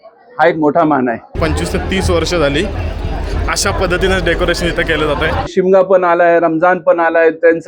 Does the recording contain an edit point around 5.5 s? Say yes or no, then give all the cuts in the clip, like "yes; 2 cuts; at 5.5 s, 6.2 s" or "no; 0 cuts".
yes; 2 cuts; at 1.3 s, 5.5 s